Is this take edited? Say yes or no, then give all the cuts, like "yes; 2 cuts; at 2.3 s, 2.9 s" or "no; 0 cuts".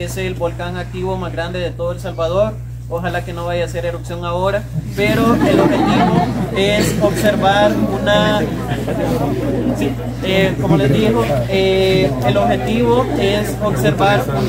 no; 0 cuts